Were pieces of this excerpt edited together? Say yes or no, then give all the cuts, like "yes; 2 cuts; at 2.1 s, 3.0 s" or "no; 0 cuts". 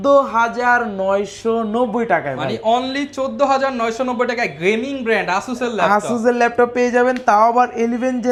no; 0 cuts